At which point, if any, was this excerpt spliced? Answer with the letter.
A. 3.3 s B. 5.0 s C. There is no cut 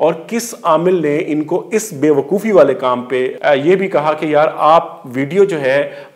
A